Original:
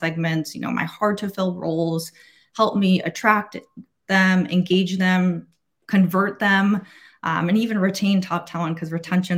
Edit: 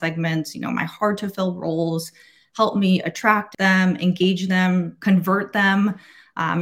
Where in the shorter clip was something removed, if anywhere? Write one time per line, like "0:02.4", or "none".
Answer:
0:03.5
0:04.9